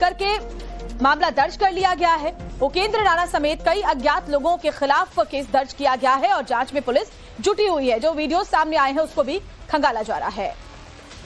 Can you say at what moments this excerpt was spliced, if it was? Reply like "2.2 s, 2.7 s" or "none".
none